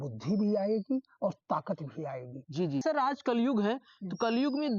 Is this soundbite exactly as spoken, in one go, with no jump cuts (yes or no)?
no